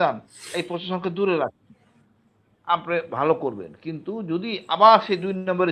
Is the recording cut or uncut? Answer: uncut